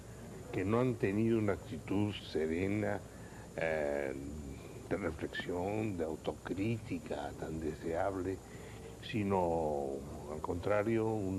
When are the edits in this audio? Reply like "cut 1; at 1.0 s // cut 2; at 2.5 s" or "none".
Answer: cut 1; at 9.6 s